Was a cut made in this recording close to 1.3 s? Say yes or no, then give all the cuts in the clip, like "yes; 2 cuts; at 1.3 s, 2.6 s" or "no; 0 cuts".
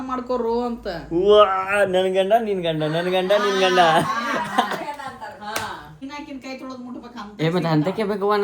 no; 1 cut; at 6.0 s